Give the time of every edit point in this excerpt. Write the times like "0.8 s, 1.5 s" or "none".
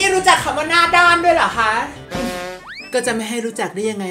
none

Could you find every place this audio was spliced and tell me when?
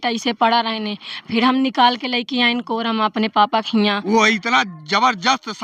4.0 s

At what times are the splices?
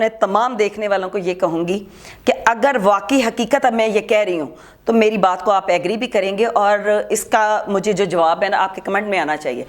none

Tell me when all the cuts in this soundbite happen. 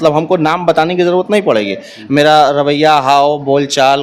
none

